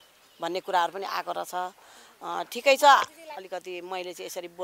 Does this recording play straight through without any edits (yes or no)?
no